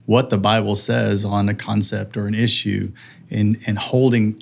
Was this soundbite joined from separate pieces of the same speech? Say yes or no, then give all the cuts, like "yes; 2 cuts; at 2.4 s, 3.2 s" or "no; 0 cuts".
no; 0 cuts